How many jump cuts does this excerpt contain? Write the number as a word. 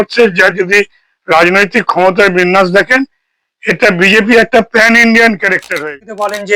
one